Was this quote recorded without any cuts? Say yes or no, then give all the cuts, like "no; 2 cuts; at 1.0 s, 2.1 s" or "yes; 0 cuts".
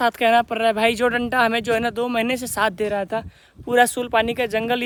yes; 0 cuts